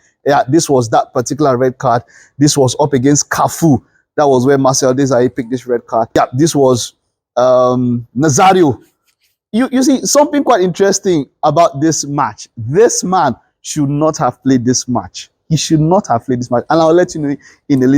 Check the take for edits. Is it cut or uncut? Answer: cut